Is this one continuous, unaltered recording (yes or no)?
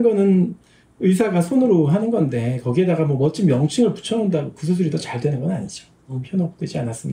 no